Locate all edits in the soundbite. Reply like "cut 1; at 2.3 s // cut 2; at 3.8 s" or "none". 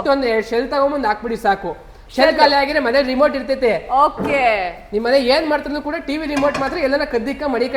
none